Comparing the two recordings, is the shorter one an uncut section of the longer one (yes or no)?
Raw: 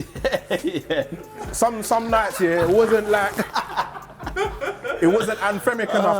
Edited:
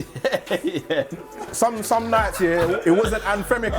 no